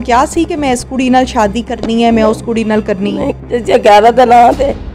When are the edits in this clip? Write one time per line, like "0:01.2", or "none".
0:03.4